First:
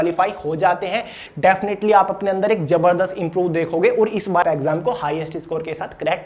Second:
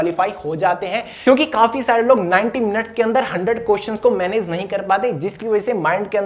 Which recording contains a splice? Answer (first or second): first